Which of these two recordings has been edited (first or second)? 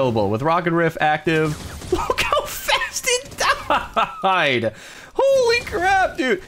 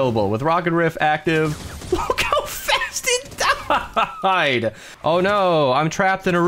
second